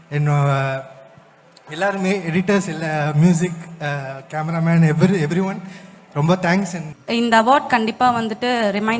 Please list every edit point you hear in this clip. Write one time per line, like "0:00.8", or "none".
0:06.9